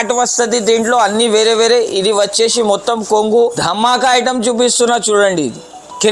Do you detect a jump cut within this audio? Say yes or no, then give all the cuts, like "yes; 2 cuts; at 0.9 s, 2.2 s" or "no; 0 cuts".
yes; 1 cut; at 3.6 s